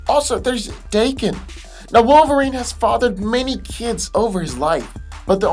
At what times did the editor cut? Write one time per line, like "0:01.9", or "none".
0:04.6